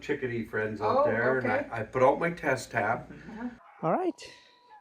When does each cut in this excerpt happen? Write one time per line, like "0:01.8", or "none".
0:03.7